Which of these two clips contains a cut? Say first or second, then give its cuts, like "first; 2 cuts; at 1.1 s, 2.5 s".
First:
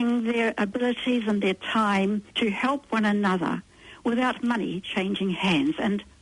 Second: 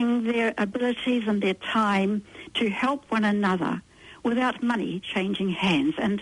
first; 1 cut; at 2.3 s